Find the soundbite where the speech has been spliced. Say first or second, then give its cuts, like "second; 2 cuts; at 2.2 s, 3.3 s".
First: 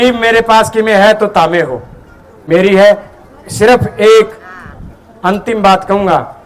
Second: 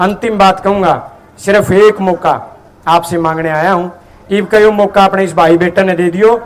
first; 1 cut; at 2.4 s